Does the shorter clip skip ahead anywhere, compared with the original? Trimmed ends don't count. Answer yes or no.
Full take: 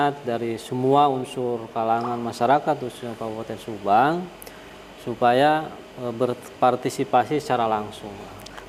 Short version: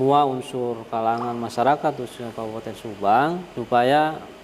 yes